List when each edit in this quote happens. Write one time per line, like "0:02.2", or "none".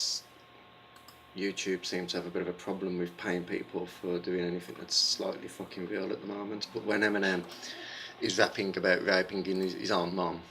0:02.6